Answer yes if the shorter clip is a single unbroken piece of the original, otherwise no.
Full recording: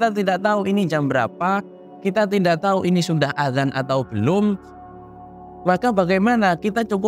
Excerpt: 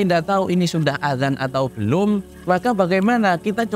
no